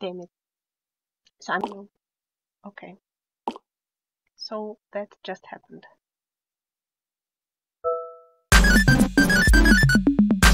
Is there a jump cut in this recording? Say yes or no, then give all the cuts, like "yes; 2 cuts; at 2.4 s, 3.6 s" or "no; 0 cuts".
yes; 1 cut; at 1.6 s